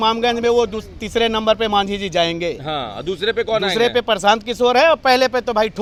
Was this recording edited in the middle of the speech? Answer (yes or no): no